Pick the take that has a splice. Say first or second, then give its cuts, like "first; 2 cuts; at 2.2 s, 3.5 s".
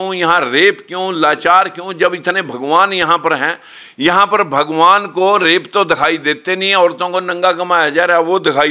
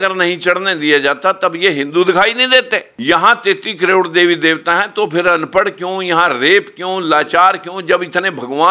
second; 1 cut; at 2.9 s